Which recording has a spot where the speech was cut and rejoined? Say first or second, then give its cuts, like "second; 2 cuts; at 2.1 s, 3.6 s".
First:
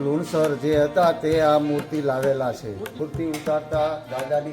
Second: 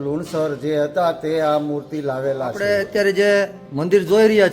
second; 1 cut; at 2.6 s